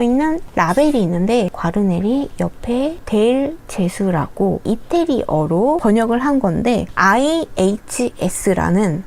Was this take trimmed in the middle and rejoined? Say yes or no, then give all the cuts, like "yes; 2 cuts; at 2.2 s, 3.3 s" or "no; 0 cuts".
no; 0 cuts